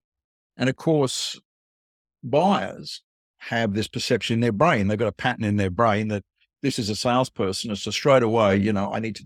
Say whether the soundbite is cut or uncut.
uncut